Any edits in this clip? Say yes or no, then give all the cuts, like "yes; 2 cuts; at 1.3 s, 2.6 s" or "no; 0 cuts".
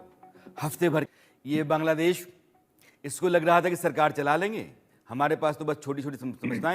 yes; 1 cut; at 1.1 s